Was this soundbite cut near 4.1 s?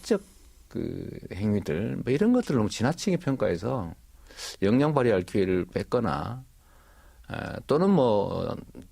no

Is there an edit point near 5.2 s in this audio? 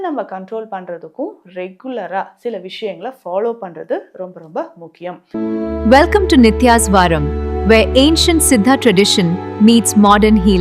yes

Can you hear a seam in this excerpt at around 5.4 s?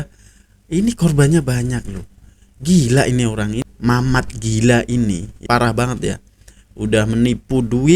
yes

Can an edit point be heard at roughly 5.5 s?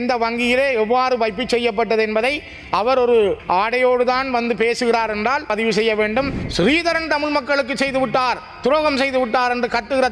yes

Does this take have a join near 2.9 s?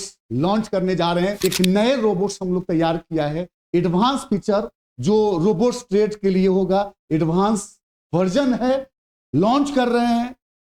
no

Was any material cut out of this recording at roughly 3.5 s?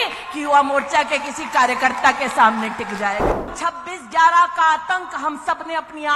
yes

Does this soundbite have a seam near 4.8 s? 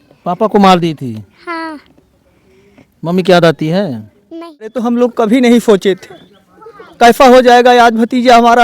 yes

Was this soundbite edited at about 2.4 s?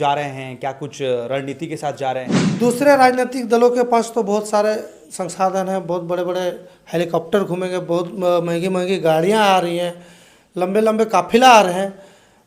yes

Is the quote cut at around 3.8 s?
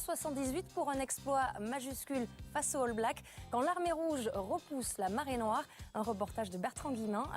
no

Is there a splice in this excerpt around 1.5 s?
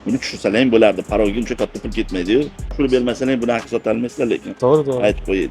no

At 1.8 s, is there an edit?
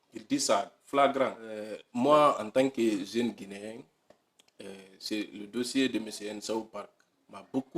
yes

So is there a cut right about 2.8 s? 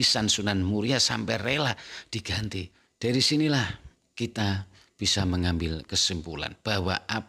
yes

